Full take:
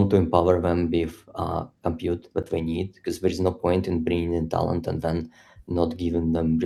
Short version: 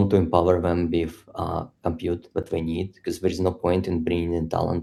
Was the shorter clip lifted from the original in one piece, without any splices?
yes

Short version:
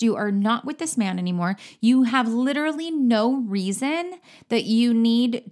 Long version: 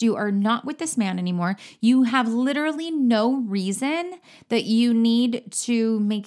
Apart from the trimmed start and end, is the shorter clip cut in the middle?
no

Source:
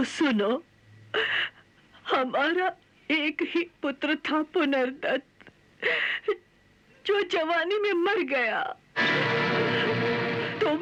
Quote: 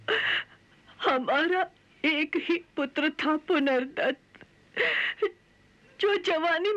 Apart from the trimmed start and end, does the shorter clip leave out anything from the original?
no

